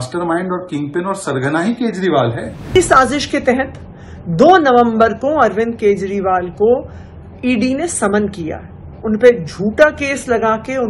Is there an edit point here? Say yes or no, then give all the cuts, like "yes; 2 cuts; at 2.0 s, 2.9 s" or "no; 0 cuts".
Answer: yes; 1 cut; at 2.8 s